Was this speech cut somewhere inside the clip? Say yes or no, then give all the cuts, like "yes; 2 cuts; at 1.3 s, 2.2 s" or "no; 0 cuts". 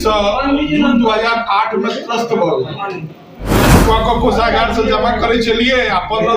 yes; 1 cut; at 3.7 s